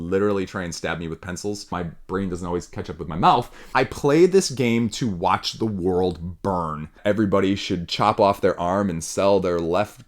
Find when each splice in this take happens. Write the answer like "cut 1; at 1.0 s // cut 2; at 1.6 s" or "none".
cut 1; at 1.7 s // cut 2; at 3.6 s // cut 3; at 7.0 s